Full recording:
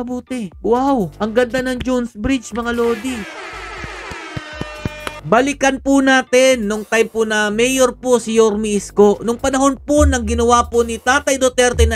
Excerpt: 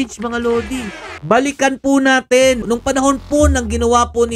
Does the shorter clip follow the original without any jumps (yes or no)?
no